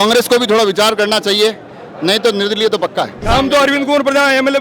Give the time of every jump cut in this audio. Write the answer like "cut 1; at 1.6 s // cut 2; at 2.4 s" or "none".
cut 1; at 3.2 s